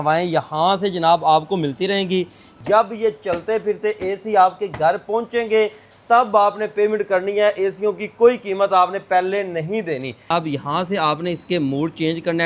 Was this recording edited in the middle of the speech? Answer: yes; 2 cuts; at 2.6 s, 10.3 s

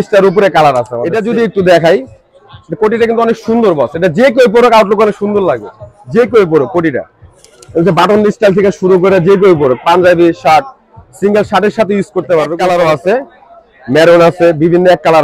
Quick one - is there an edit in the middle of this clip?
yes; 2 cuts; at 1.0 s, 12.6 s

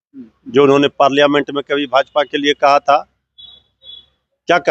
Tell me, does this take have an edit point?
no; 0 cuts

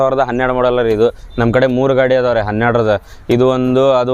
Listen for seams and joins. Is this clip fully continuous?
yes; 0 cuts

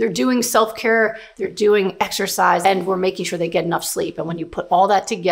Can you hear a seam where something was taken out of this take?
yes; 2 cuts; at 1.2 s, 2.6 s

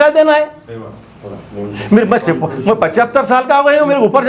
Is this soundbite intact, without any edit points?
yes; 0 cuts

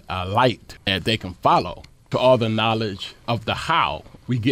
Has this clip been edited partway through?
yes; 1 cut; at 0.9 s

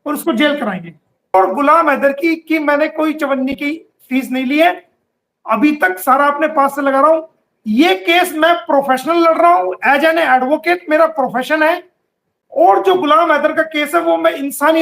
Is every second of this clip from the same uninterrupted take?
no; 1 cut; at 1.3 s

